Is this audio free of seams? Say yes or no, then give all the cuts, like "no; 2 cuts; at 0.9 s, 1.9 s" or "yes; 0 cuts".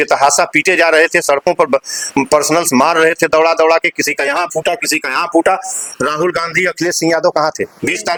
yes; 0 cuts